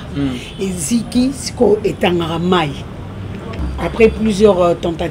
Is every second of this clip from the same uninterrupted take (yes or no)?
no